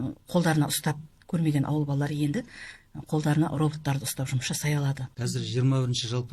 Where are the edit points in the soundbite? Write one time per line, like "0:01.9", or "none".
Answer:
0:05.1